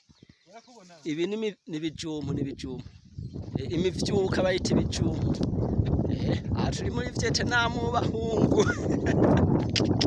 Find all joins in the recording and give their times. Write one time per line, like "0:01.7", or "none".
none